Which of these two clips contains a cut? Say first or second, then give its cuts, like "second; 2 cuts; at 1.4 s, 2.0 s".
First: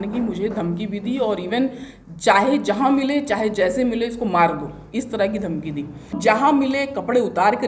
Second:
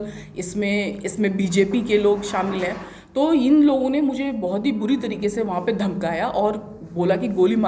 first; 1 cut; at 6.2 s